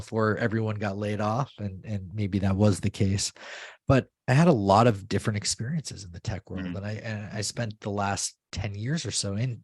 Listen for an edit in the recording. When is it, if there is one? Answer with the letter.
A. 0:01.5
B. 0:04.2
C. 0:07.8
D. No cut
B